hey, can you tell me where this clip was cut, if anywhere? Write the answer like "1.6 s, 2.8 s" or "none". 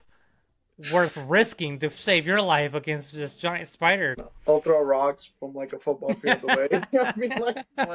4.1 s

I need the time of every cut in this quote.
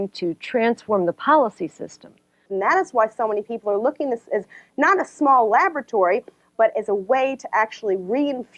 2.5 s

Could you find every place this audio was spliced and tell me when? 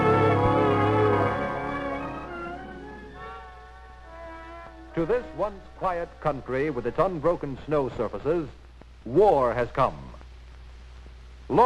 2.5 s

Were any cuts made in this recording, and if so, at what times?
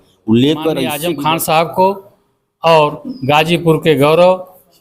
1.0 s

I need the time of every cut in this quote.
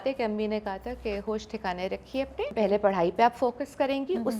2.5 s

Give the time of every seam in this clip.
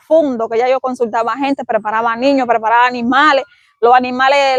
none

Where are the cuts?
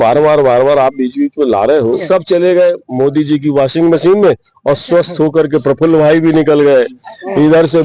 2.0 s

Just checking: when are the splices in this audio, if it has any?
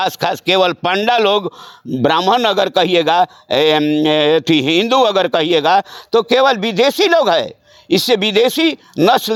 none

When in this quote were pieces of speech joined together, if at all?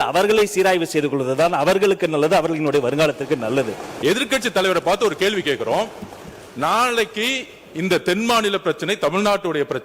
3.8 s

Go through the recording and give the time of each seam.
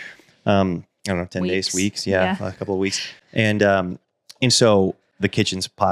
none

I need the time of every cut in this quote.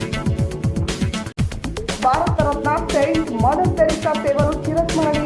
1.7 s

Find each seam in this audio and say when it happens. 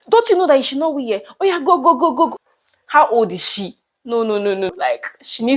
2.4 s, 4.7 s

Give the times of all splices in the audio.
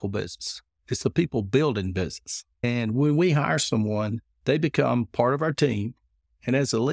2.6 s, 4.2 s

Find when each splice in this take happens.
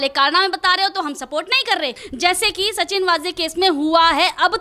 2.0 s

